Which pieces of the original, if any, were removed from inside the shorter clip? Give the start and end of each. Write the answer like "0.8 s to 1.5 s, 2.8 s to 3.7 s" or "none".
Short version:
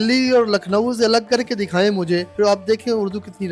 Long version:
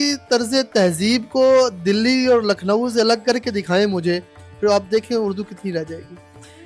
4.2 s to 4.5 s